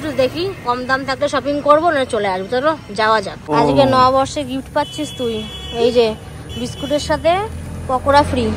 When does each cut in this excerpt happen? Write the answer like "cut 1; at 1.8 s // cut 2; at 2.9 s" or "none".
cut 1; at 3.5 s